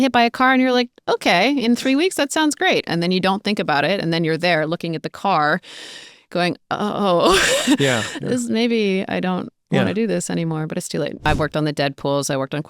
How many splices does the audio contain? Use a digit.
1